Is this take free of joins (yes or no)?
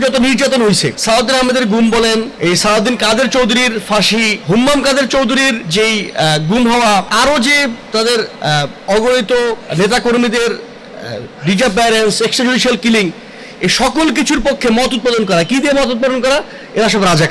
no